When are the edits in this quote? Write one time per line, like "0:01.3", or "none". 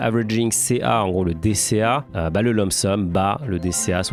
none